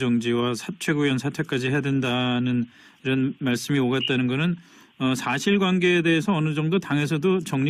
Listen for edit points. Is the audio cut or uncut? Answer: cut